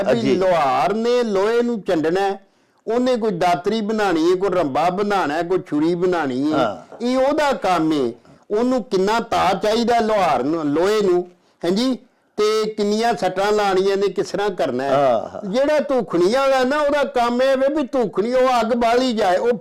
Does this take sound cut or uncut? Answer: uncut